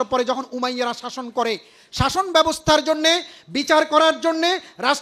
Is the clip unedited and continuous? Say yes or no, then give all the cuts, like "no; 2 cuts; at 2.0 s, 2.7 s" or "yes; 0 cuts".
yes; 0 cuts